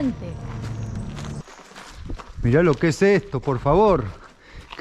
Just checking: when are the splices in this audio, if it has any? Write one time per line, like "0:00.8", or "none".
0:01.4